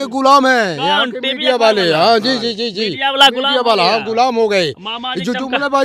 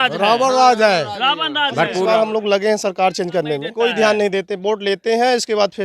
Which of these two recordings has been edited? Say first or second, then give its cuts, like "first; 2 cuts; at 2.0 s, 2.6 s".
second; 2 cuts; at 2.0 s, 3.7 s